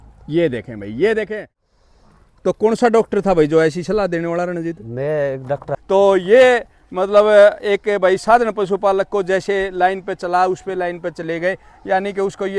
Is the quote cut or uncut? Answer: cut